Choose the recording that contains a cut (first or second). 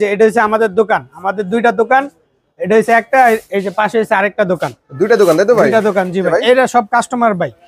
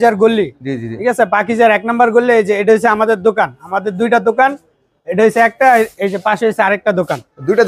first